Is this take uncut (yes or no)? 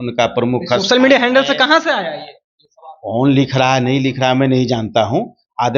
yes